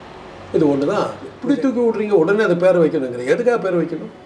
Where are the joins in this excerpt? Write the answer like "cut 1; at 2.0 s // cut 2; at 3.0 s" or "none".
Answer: cut 1; at 1.3 s